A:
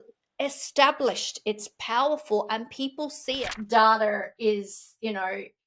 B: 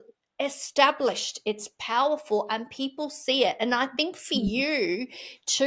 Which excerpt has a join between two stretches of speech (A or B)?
A